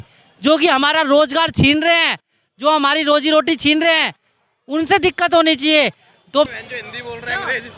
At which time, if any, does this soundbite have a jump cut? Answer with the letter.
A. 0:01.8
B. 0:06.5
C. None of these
B